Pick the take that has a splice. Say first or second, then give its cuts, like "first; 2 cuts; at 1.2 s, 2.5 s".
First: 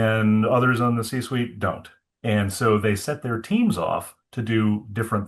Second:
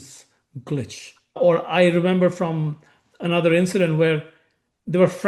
second; 1 cut; at 1.2 s